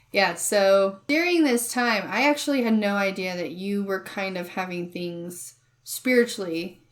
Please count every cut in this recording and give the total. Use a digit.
1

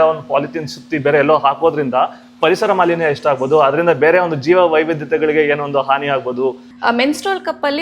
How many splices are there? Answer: 1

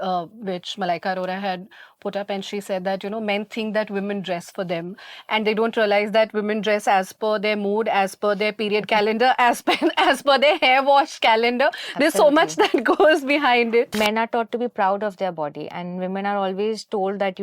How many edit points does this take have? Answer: 1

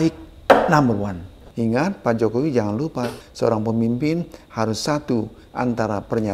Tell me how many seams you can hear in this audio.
2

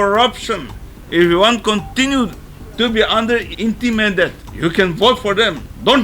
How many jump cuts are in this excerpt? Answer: 2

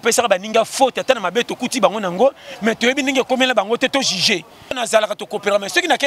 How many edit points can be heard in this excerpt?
1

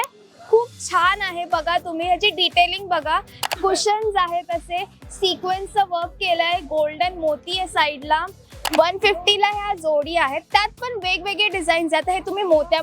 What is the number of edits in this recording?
2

